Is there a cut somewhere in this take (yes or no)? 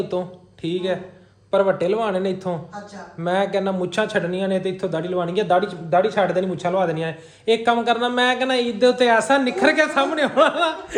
no